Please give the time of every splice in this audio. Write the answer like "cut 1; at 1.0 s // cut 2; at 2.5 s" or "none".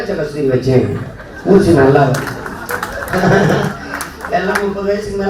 none